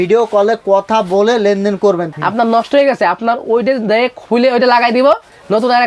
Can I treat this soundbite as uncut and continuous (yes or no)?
no